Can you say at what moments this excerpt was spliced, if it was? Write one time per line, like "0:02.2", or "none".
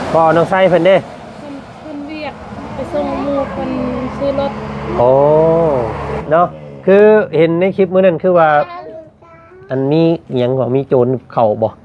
0:06.2